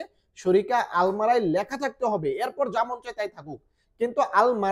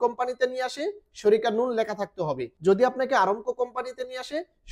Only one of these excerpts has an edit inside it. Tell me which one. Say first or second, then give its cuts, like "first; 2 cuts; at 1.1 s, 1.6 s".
second; 1 cut; at 2.5 s